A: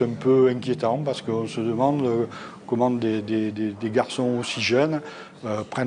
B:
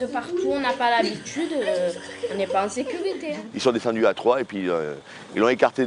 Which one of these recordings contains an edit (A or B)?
B